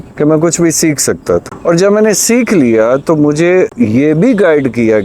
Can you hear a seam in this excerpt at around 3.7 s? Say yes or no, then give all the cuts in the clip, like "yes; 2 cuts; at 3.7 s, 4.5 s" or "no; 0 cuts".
yes; 2 cuts; at 1.5 s, 3.7 s